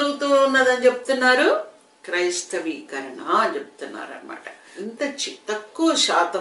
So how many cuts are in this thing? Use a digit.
1